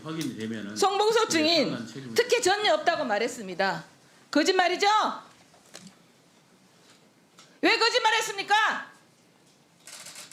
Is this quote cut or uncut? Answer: uncut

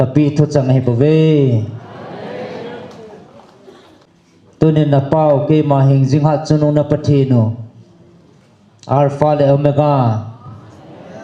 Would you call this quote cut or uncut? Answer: cut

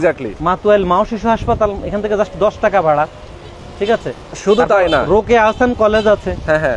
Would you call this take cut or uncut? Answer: uncut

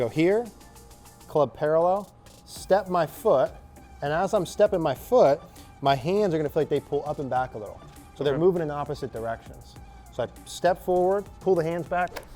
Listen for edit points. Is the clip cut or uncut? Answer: uncut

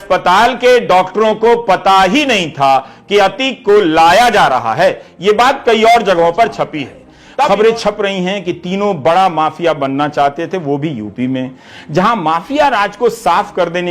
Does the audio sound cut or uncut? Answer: cut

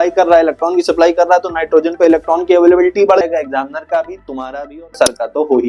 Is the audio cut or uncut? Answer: cut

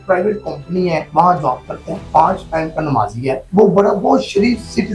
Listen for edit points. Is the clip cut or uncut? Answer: cut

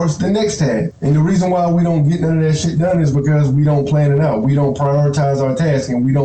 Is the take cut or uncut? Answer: cut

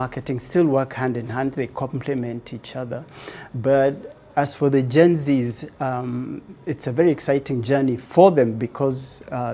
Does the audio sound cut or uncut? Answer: uncut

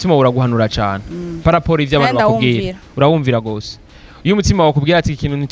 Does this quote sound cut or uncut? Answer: uncut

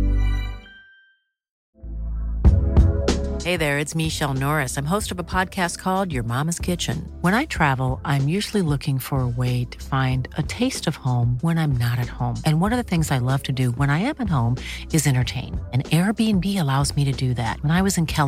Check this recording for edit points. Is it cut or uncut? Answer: cut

